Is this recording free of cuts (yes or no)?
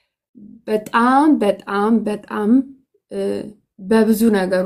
yes